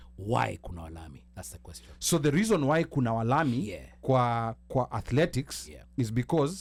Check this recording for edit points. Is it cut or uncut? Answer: uncut